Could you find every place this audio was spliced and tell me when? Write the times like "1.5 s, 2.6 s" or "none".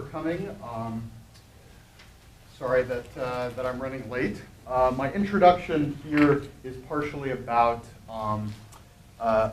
7.6 s